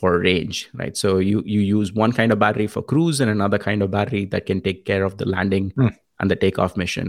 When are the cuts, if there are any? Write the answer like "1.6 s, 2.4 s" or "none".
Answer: none